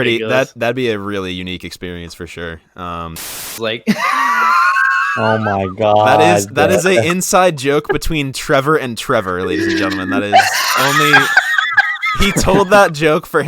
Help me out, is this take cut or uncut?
cut